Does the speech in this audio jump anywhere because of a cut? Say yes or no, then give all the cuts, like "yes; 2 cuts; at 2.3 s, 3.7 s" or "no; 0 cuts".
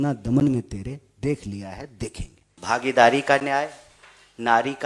yes; 1 cut; at 2.5 s